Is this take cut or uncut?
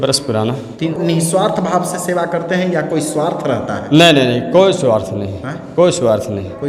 cut